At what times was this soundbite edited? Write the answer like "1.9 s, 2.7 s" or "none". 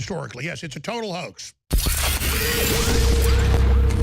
1.5 s

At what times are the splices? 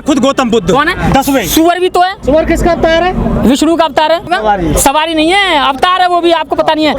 2.2 s, 4.2 s

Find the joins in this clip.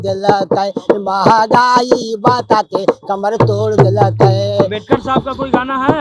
none

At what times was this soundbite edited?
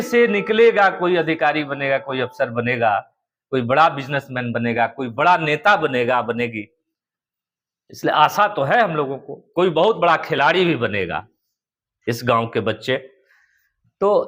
none

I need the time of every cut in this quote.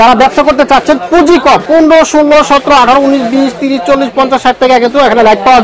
1.6 s

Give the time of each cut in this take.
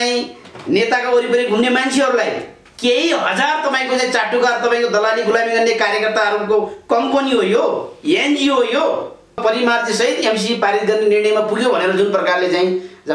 9.4 s

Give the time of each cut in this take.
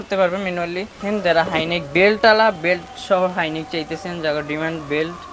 1.0 s

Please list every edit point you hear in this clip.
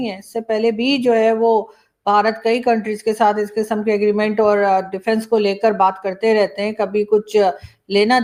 none

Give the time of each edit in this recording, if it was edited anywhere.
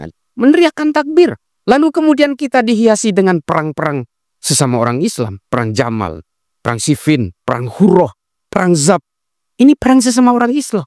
1.6 s

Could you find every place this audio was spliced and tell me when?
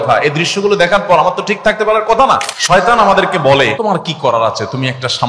2.5 s, 3.7 s

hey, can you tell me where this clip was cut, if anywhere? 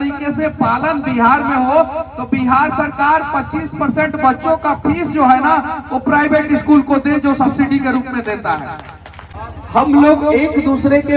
9.5 s

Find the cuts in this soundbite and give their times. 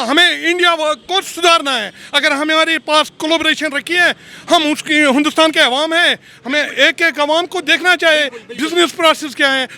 none

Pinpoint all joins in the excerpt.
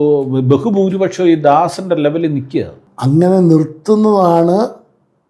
2.8 s

